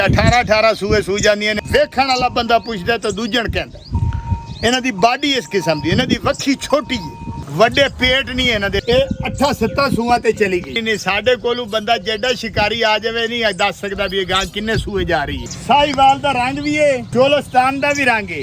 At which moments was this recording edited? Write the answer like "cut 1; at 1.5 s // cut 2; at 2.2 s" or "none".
cut 1; at 1.6 s // cut 2; at 7.4 s // cut 3; at 8.8 s // cut 4; at 10.7 s // cut 5; at 15.5 s // cut 6; at 17.1 s